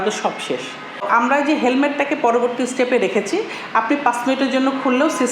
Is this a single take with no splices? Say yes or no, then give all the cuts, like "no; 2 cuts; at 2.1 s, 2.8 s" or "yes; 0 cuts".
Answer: no; 1 cut; at 1.0 s